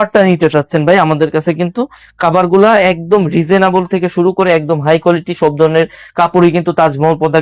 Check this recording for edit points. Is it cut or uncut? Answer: uncut